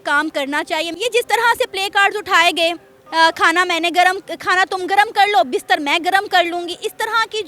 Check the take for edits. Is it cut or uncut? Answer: cut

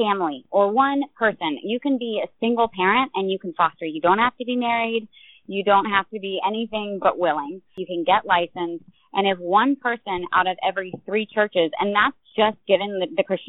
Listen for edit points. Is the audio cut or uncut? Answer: uncut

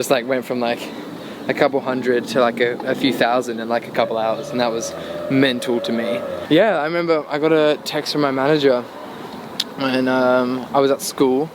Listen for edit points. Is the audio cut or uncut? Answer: cut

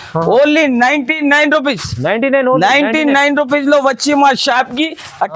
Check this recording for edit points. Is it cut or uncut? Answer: uncut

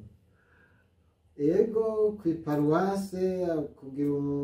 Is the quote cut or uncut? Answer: uncut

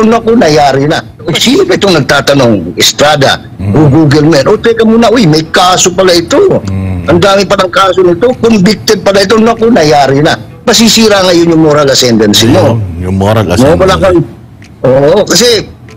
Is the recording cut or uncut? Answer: cut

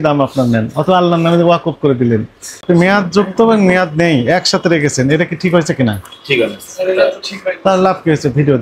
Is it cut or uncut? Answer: cut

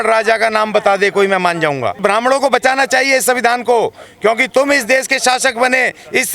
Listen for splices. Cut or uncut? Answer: cut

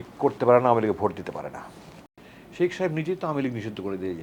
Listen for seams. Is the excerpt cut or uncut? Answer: cut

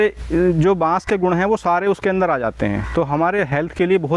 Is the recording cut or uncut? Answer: uncut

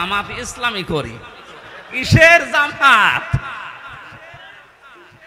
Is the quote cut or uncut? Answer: uncut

